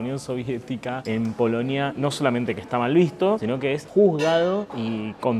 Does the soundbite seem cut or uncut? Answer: uncut